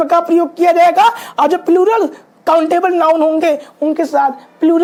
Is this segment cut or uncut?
uncut